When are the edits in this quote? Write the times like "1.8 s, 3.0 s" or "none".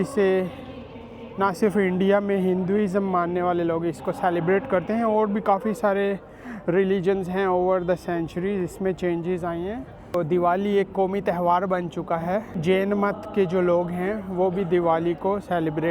10.1 s, 12.5 s